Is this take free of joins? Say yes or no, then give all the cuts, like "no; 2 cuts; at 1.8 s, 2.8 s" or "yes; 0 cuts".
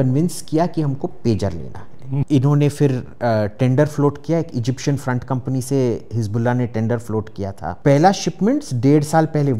no; 2 cuts; at 2.2 s, 7.6 s